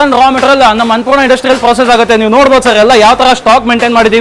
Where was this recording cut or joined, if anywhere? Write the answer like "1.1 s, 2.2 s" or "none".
none

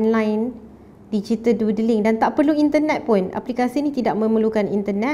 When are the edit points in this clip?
none

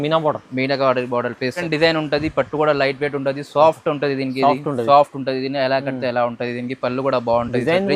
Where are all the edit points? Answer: 1.6 s

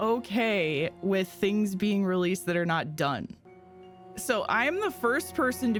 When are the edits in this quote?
none

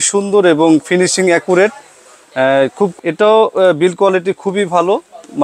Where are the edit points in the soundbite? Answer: 2.9 s

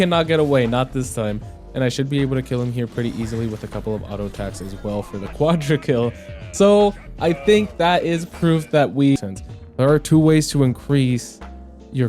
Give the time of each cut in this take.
9.2 s

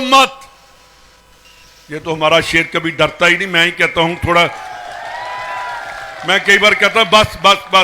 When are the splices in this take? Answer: none

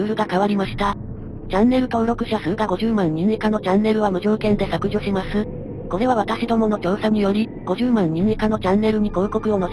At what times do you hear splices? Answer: none

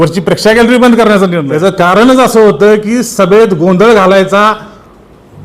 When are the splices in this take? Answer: 1.4 s

